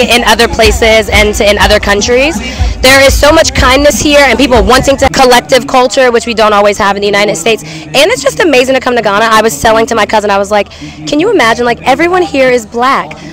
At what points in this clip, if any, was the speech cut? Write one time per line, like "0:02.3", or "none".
0:05.1